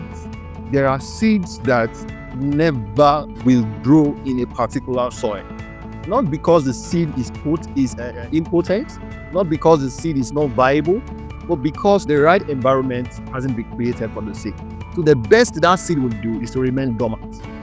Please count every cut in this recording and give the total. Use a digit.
0